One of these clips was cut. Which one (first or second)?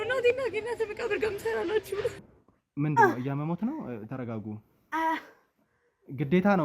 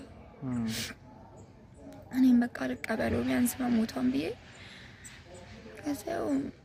first